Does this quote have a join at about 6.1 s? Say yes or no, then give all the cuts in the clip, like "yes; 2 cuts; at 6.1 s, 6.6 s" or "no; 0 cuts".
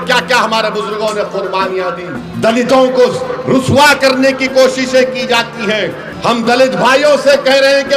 yes; 2 cuts; at 2.2 s, 6.1 s